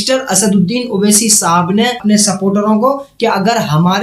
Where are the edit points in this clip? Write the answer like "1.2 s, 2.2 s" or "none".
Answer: 2.0 s